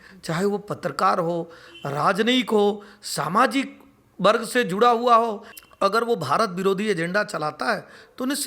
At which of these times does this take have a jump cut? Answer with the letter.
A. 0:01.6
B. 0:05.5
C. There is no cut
B